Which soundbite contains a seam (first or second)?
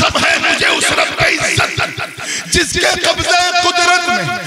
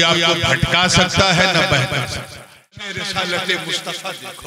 second